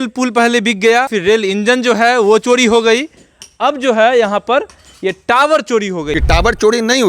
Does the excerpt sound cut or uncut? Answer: cut